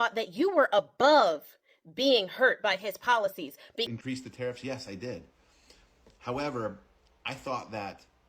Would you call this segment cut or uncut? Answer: cut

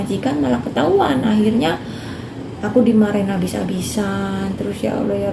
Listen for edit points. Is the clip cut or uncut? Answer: uncut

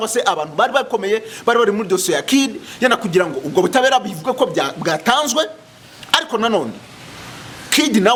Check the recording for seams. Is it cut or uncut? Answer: uncut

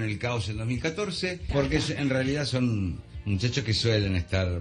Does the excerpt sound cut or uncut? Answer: uncut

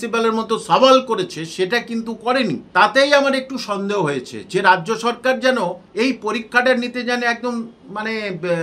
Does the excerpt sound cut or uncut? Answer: cut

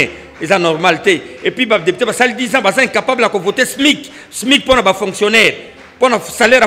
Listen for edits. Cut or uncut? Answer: uncut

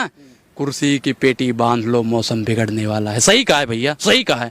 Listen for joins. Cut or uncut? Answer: uncut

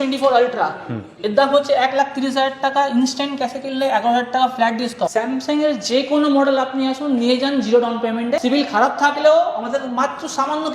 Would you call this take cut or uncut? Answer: cut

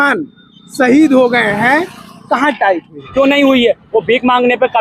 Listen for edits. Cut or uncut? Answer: cut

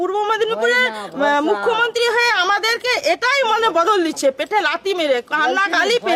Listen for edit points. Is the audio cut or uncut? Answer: uncut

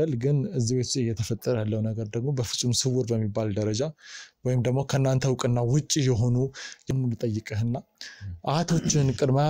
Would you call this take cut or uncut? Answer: cut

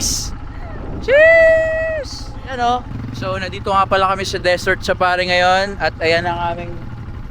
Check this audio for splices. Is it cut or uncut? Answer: cut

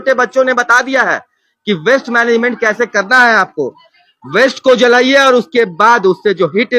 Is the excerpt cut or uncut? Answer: uncut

